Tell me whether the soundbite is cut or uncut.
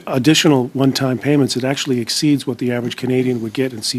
uncut